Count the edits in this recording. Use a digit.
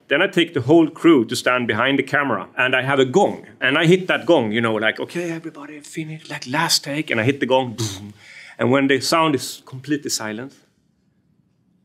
2